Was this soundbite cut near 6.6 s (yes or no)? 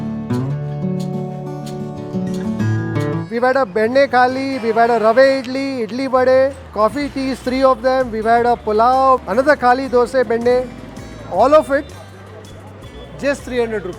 yes